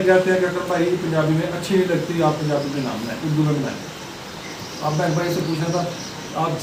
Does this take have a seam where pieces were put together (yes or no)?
no